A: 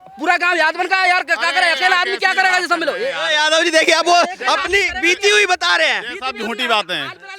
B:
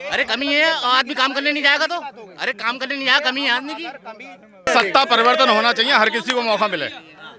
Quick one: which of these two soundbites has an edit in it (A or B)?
B